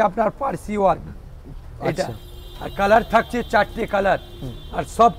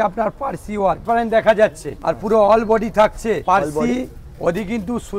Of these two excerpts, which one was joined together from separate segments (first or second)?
second